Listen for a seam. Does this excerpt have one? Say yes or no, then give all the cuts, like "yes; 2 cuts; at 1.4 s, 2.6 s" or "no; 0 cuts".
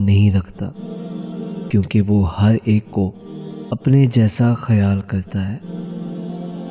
yes; 1 cut; at 5.6 s